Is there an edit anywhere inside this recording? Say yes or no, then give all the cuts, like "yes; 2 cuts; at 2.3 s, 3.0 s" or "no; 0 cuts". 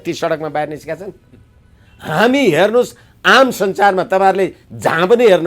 no; 0 cuts